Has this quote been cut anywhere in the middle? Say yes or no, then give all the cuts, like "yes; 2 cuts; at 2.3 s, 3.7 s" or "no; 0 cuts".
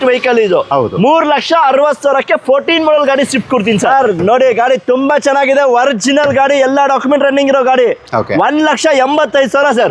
yes; 1 cut; at 3.9 s